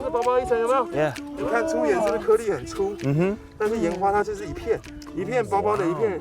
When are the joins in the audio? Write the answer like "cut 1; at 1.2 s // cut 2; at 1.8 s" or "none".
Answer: cut 1; at 1.3 s // cut 2; at 5.0 s